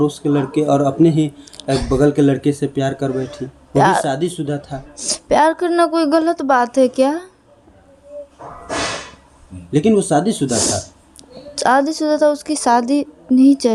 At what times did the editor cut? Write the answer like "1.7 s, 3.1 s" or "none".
none

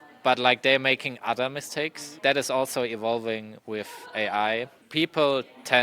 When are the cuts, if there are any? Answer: 2.1 s

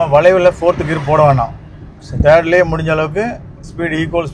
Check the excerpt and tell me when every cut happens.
none

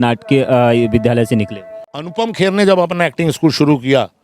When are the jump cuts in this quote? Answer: 2.0 s

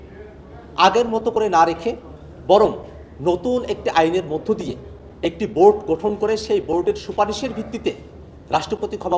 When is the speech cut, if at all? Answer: none

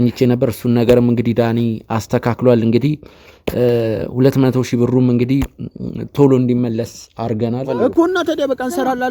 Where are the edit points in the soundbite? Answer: 7.7 s

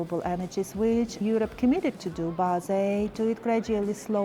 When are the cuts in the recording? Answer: 1.2 s

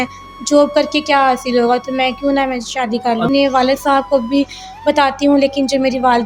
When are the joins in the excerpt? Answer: 3.3 s

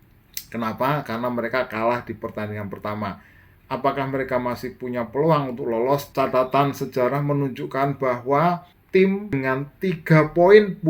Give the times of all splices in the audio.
6.1 s, 8.7 s, 9.3 s

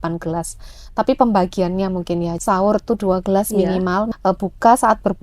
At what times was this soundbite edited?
2.3 s, 4.1 s

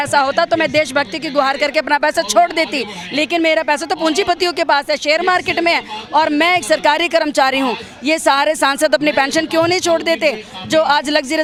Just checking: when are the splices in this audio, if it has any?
none

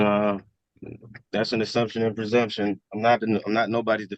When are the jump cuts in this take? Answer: none

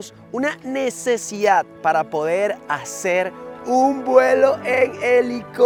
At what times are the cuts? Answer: none

